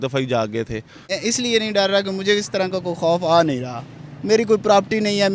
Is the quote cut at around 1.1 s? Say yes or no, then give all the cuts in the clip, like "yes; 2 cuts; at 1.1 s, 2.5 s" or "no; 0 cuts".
yes; 1 cut; at 1.1 s